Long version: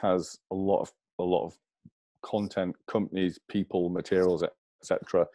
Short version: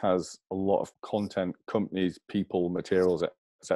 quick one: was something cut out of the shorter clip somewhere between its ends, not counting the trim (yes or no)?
yes